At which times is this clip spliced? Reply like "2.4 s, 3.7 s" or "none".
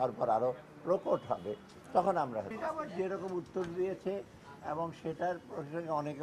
2.5 s